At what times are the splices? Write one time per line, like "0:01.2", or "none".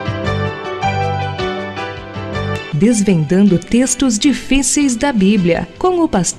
none

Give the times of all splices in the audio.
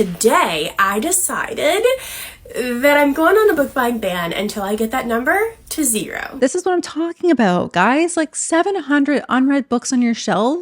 0:06.2

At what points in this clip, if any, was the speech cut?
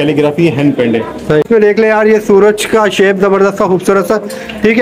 0:01.4

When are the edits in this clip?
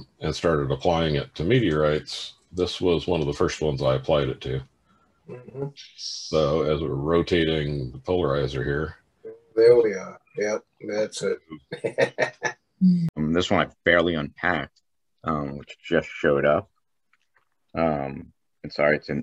0:13.2

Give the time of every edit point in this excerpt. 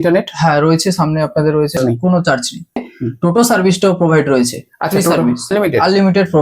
0:01.7
0:02.9
0:05.5

